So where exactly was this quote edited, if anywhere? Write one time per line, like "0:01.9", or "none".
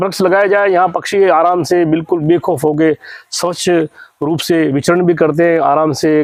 none